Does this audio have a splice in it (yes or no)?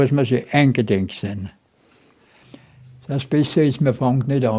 yes